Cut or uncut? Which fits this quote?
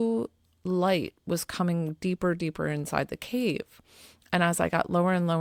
uncut